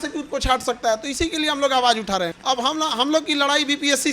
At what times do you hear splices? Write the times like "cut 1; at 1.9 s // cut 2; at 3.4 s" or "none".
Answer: cut 1; at 2.4 s